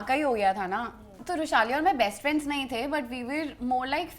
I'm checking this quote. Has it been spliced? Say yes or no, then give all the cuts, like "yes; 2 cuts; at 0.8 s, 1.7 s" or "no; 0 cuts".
yes; 1 cut; at 1.2 s